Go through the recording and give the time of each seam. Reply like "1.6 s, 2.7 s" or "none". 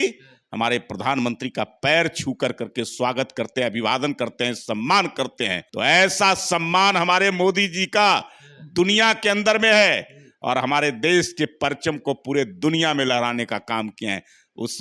5.6 s